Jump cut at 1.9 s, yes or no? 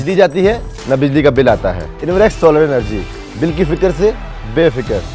yes